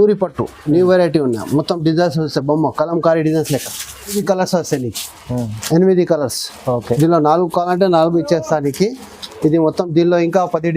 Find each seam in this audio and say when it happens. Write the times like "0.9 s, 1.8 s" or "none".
4.2 s